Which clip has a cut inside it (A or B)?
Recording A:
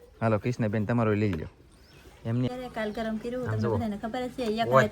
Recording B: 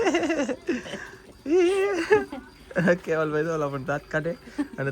A